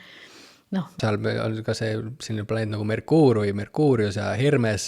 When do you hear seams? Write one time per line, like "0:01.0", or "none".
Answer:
0:01.0

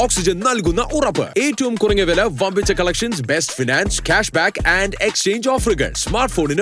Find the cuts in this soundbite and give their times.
none

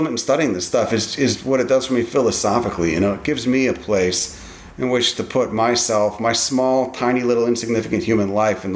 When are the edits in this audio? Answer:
none

